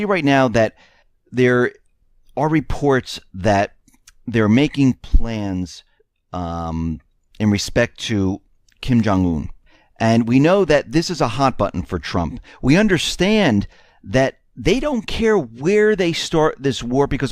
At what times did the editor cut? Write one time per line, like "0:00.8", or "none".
0:10.3